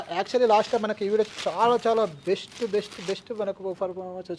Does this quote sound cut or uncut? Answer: uncut